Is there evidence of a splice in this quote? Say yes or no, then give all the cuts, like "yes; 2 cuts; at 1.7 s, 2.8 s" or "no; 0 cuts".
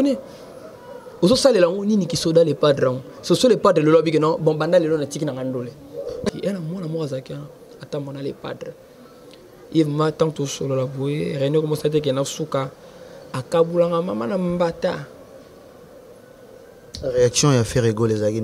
yes; 1 cut; at 6.3 s